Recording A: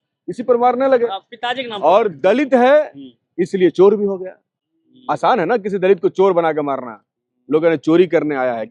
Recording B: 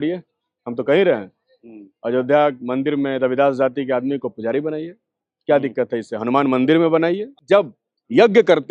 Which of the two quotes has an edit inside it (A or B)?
B